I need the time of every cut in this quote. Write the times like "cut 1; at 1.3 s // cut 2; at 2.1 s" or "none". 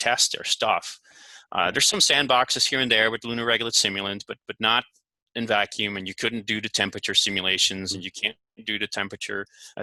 none